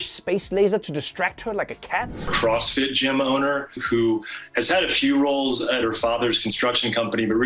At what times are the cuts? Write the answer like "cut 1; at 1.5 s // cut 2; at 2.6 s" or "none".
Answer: cut 1; at 2.2 s